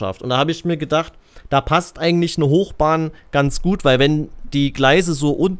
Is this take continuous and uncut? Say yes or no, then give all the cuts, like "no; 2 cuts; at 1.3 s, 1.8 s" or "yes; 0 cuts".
yes; 0 cuts